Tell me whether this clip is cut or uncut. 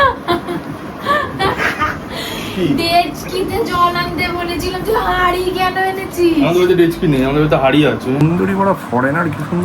cut